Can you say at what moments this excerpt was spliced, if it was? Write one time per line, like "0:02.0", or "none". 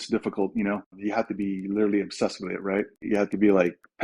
0:01.0
0:03.1